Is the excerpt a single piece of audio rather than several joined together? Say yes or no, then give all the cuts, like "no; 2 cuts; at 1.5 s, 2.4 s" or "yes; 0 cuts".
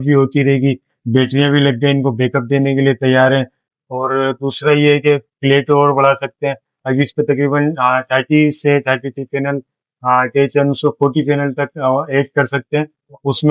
yes; 0 cuts